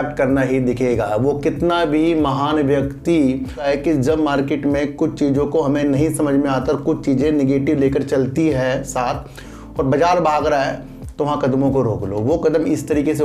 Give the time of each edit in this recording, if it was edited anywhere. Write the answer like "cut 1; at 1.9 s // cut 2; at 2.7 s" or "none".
cut 1; at 3.6 s